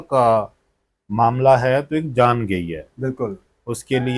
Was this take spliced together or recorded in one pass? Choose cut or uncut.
uncut